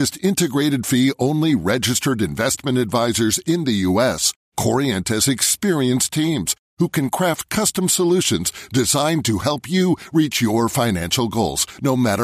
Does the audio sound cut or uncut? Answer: uncut